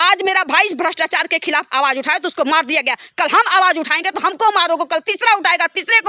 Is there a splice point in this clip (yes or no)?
no